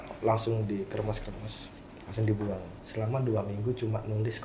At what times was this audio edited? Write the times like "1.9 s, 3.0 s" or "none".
2.8 s